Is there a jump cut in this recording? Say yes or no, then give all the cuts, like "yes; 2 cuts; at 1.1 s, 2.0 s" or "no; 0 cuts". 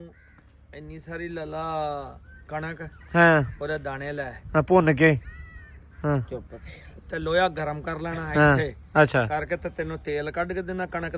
no; 0 cuts